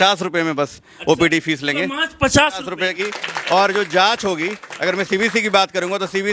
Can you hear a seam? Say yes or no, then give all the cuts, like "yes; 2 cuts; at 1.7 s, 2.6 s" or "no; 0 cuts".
yes; 1 cut; at 3.0 s